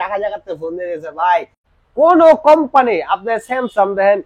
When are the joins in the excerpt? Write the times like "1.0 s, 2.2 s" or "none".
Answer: 1.6 s